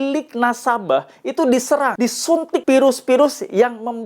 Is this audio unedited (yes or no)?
no